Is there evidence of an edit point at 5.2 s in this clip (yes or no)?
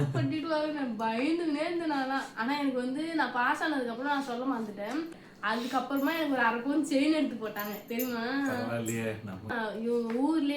yes